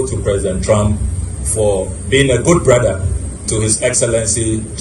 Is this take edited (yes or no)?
no